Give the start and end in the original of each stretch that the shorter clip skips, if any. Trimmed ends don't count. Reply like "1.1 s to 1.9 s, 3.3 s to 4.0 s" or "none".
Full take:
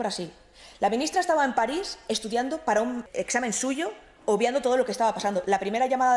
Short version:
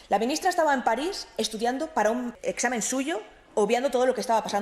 none